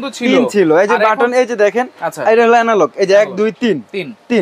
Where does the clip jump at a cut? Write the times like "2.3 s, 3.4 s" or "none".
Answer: none